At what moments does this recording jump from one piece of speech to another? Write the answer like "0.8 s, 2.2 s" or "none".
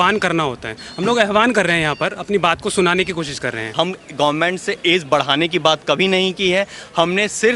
3.7 s